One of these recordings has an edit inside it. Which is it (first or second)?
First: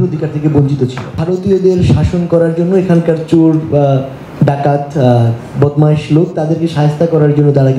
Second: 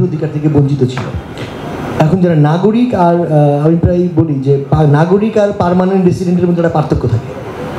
first